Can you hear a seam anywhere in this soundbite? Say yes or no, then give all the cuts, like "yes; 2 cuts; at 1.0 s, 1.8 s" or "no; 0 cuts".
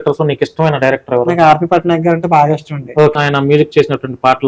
yes; 1 cut; at 3.1 s